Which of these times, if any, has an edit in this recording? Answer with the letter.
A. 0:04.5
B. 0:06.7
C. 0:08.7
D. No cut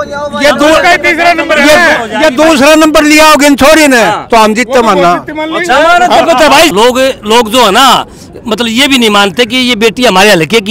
B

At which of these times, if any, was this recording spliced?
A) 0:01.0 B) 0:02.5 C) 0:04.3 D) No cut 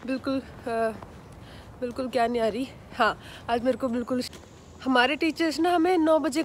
C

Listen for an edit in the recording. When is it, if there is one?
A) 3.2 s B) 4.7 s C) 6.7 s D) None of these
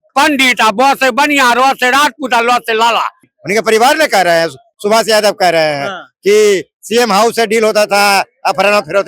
A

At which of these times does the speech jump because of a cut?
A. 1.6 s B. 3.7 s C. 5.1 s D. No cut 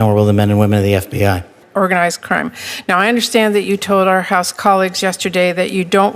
A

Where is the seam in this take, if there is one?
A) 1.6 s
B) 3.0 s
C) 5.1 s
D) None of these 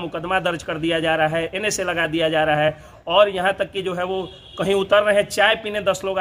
D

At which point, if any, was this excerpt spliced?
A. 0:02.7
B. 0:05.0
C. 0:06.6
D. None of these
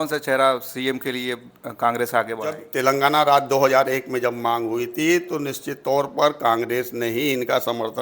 A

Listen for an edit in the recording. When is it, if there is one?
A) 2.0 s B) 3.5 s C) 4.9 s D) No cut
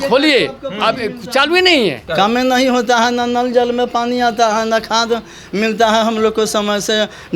A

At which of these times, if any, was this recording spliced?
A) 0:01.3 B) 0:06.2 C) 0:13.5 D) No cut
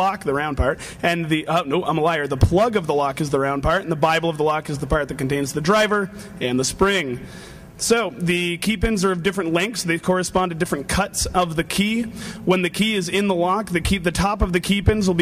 A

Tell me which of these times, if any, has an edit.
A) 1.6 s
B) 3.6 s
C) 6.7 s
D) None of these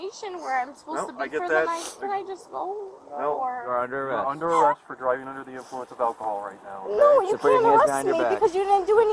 B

